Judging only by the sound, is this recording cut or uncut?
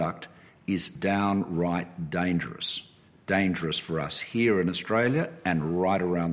cut